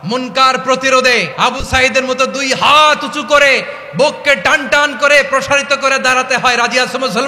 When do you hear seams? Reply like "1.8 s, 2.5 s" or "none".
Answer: 1.3 s